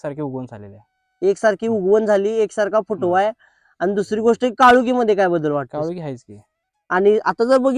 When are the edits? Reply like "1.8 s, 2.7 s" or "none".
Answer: none